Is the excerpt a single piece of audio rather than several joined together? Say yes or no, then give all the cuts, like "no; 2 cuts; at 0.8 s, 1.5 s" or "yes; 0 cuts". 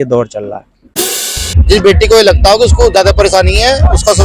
no; 1 cut; at 1.1 s